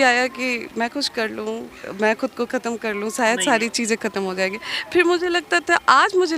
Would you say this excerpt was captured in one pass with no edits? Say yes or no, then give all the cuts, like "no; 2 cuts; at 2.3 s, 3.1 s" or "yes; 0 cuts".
yes; 0 cuts